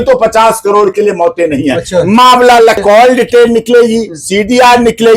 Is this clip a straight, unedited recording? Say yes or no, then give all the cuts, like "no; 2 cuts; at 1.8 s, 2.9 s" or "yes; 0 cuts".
no; 1 cut; at 2.8 s